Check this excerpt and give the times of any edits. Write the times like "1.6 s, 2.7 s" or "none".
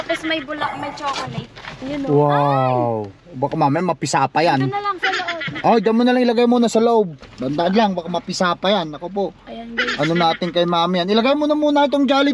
7.2 s